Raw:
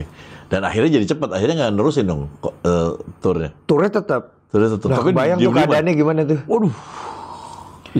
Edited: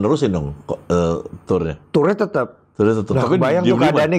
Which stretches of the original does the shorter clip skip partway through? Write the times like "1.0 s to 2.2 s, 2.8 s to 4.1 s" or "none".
none